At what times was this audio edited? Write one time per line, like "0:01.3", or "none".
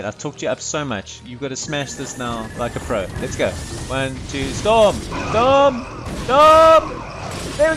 none